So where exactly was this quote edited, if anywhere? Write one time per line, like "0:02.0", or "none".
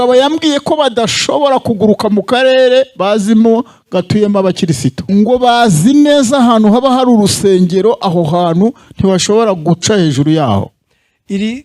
0:05.0

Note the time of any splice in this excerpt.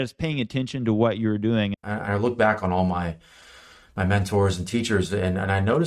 0:01.7

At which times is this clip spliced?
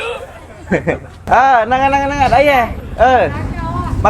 0:01.2

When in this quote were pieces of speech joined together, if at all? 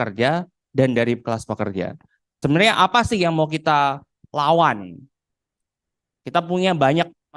0:02.2

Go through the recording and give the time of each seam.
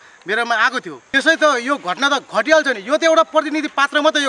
0:00.9

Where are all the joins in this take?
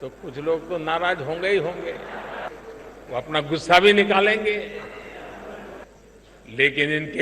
0:02.5
0:05.8

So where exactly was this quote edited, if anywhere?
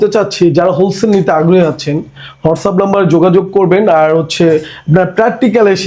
none

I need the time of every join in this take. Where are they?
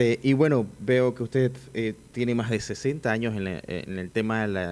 none

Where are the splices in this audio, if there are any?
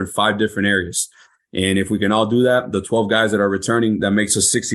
none

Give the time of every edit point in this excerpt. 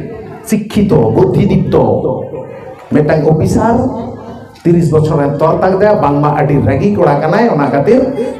none

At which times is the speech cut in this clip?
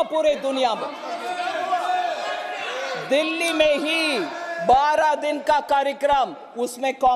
none

